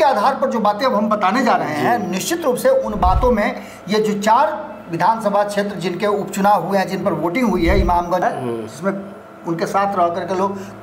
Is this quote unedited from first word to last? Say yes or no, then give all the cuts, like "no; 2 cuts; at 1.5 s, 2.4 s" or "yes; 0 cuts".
no; 1 cut; at 8.2 s